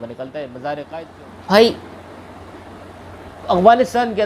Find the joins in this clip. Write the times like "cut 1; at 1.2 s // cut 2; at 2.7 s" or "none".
cut 1; at 1.0 s